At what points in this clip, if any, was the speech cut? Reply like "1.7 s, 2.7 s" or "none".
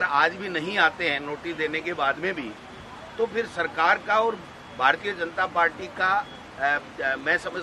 none

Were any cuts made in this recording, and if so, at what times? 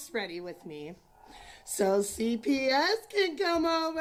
none

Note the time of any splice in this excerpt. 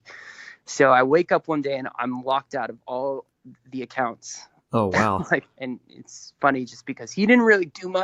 5.6 s

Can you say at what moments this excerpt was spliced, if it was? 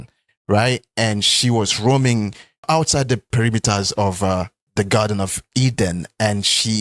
3.3 s

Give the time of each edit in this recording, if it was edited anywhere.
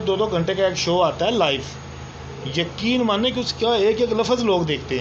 none

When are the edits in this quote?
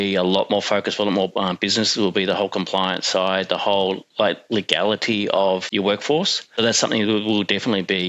5.7 s, 6.5 s

